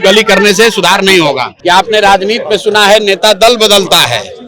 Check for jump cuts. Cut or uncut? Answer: cut